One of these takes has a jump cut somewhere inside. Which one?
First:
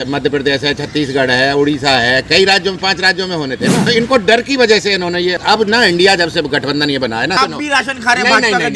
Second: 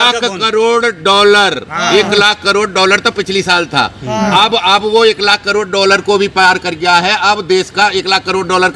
first; 3 cuts; at 3.8 s, 5.4 s, 7.4 s

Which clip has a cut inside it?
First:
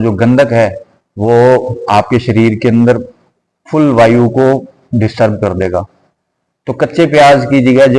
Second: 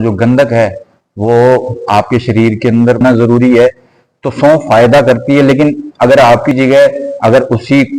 second; 2 cuts; at 3.0 s, 6.5 s

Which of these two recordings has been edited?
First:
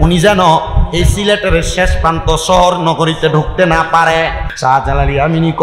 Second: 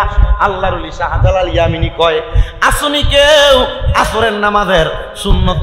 first; 1 cut; at 4.5 s

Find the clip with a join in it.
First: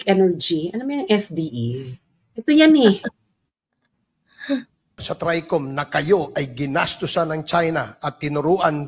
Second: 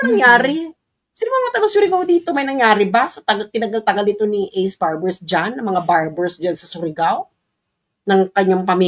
first; 1 cut; at 5.0 s

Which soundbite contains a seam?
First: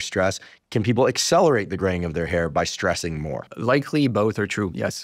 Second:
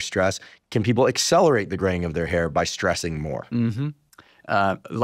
first; 1 cut; at 3.5 s

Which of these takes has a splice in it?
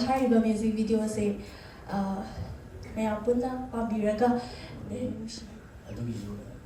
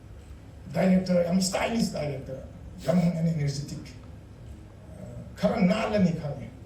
first; 1 cut; at 5.2 s

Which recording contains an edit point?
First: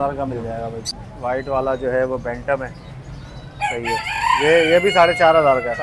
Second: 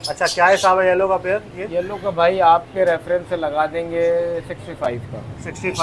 first; 1 cut; at 1.0 s

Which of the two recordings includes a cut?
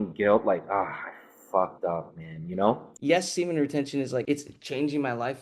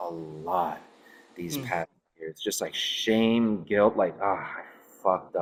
first; 2 cuts; at 2.9 s, 4.2 s

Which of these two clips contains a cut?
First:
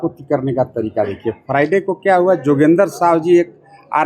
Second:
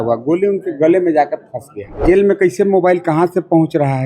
second; 1 cut; at 2.0 s

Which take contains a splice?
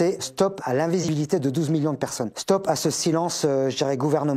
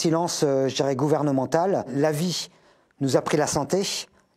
first; 1 cut; at 1.0 s

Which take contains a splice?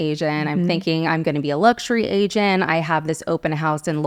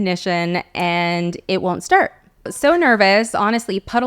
second; 1 cut; at 2.5 s

